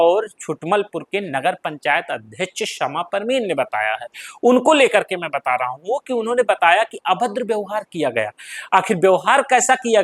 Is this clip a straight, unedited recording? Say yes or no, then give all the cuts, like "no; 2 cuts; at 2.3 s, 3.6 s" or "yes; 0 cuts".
yes; 0 cuts